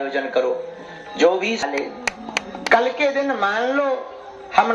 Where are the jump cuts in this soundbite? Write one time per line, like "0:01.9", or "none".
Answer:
0:01.6